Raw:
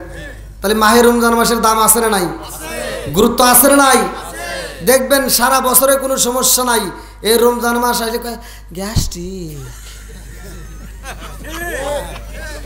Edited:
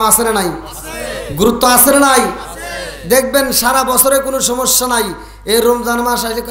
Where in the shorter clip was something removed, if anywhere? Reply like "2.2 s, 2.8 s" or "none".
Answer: none